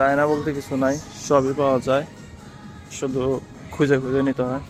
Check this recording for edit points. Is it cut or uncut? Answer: uncut